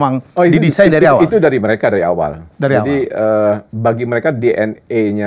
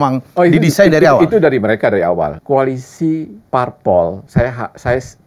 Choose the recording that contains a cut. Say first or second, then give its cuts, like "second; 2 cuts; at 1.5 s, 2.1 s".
second; 3 cuts; at 2.4 s, 3.4 s, 4.2 s